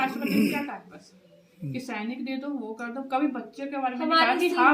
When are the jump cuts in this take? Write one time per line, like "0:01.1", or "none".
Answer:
none